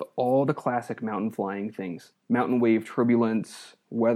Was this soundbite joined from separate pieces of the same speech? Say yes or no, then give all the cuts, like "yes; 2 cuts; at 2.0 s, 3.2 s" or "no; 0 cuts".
yes; 1 cut; at 2.1 s